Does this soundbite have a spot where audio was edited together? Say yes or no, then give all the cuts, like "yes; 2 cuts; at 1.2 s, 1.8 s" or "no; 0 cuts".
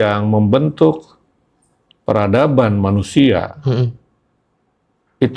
no; 0 cuts